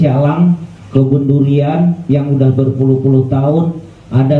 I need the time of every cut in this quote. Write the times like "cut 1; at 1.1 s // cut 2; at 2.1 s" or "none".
none